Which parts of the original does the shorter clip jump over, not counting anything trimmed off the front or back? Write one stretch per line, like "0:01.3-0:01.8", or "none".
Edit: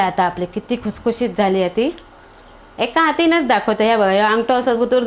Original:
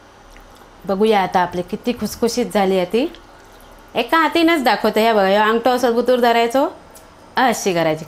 none